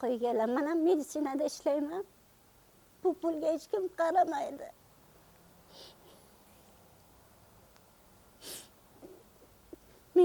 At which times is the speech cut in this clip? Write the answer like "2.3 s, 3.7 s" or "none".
none